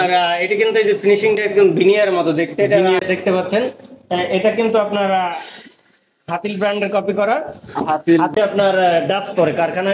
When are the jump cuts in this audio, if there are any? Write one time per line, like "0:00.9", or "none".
0:03.0
0:08.3